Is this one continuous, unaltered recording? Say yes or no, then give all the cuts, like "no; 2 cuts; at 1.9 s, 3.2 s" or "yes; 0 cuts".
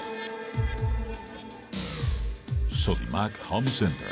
yes; 0 cuts